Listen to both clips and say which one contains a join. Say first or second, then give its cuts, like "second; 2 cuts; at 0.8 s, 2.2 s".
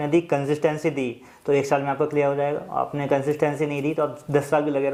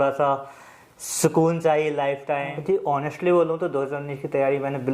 second; 1 cut; at 2.5 s